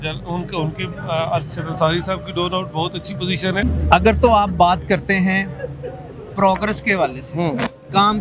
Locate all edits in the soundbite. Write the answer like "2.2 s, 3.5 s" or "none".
3.6 s